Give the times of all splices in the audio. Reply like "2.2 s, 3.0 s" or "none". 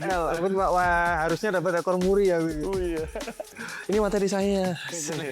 3.5 s